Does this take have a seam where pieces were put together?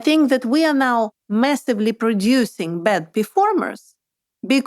no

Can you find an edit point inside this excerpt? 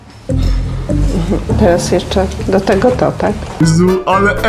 no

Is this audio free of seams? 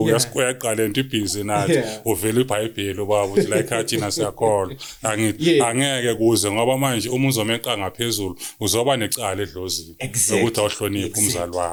yes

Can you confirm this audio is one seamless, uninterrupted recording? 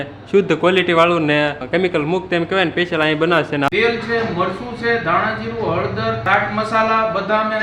no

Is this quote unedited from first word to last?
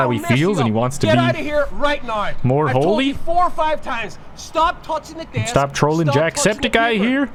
yes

